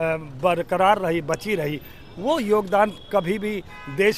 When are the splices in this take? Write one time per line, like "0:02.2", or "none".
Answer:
none

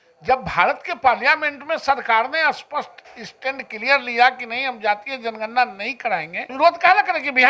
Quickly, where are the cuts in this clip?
0:06.4

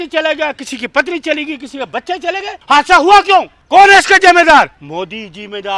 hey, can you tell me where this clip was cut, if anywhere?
0:02.5
0:03.6
0:04.8

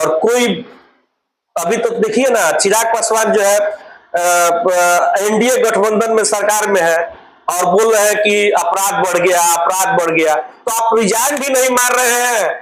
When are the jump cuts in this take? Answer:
none

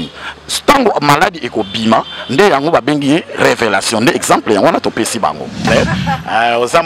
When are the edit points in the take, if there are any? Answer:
0:05.7

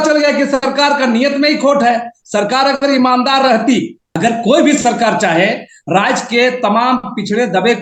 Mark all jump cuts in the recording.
0:04.0

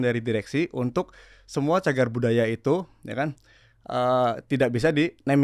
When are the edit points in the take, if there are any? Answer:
none

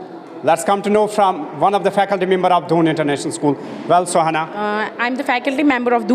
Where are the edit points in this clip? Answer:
0:04.6

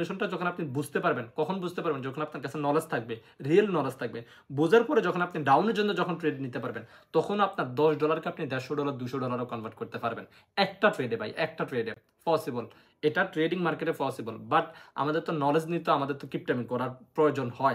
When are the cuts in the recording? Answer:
none

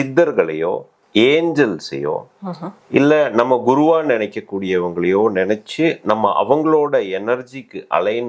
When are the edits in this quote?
0:00.9

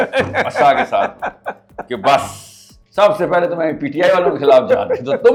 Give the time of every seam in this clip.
none

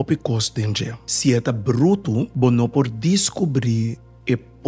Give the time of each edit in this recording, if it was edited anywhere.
0:01.0
0:02.3

